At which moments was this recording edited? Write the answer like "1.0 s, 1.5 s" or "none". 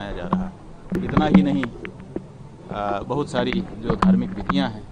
0.9 s